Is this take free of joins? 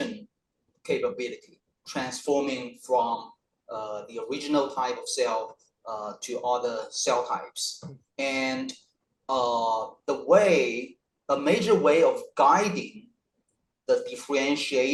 yes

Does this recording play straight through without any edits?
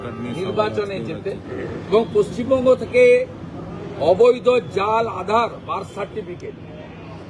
no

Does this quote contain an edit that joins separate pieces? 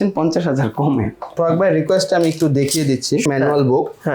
yes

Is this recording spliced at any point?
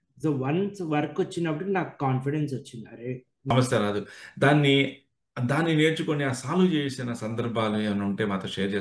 yes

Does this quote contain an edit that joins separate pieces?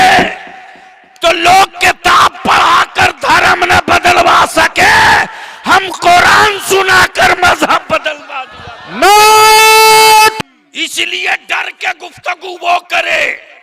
yes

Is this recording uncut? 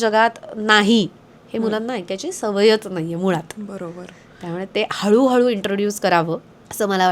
yes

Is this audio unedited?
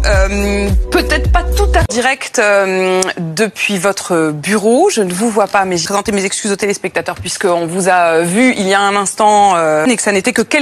no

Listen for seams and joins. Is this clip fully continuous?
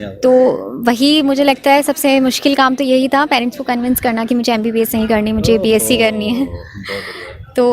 yes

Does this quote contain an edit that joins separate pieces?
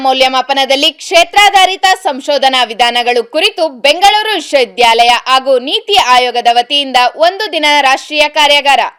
no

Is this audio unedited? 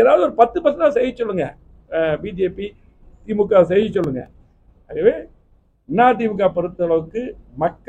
yes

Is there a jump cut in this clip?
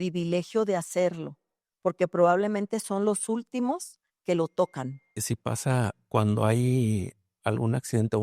yes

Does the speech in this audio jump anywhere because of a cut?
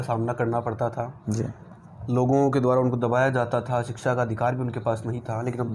no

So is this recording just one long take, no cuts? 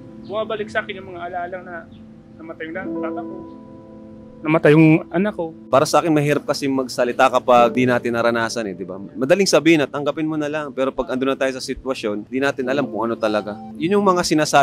no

